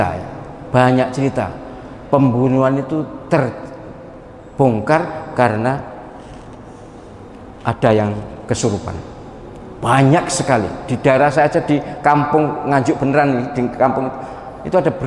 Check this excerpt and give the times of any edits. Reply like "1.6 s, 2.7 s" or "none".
none